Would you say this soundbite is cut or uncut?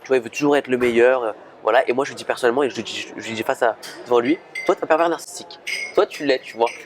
uncut